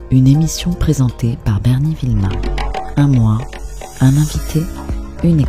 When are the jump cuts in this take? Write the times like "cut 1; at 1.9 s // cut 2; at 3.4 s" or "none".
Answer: cut 1; at 2.9 s

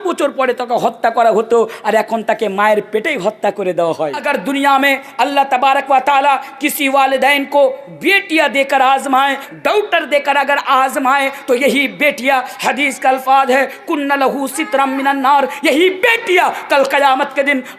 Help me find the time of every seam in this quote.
cut 1; at 4.2 s // cut 2; at 9.5 s

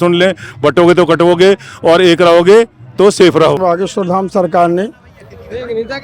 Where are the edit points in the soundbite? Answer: cut 1; at 3.6 s

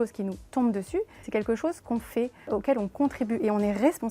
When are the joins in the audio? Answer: cut 1; at 1.2 s // cut 2; at 2.5 s

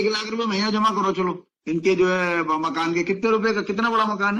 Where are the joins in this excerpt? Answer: none

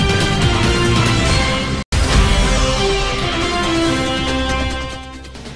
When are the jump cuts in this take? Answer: cut 1; at 1.4 s

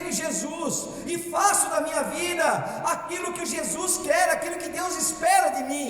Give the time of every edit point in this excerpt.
none

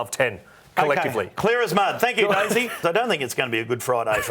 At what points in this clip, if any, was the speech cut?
cut 1; at 2.8 s

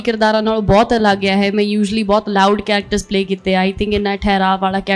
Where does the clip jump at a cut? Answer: none

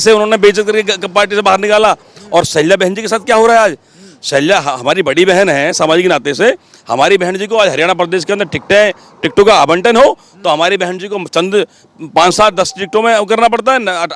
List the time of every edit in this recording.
none

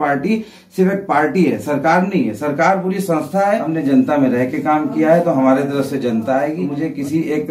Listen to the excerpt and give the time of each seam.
cut 1; at 3.7 s // cut 2; at 6.6 s

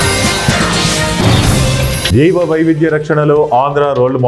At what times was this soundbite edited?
cut 1; at 2.0 s

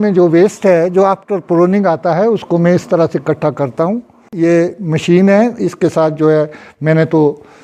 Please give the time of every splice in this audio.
cut 1; at 4.3 s

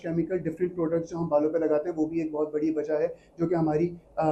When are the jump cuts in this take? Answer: none

